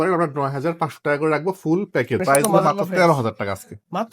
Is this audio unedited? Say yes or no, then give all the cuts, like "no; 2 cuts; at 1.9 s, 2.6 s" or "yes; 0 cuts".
no; 1 cut; at 2.2 s